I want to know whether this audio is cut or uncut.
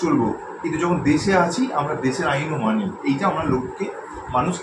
uncut